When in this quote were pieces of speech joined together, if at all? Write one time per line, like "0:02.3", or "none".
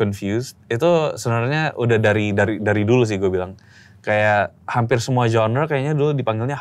none